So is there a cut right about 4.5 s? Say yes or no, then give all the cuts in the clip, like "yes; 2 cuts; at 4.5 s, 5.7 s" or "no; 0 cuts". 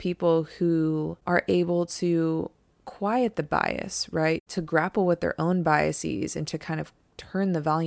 yes; 2 cuts; at 1.1 s, 4.5 s